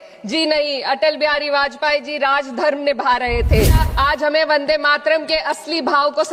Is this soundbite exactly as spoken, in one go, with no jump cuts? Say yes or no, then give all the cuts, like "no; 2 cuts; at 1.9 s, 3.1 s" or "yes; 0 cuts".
no; 1 cut; at 3.9 s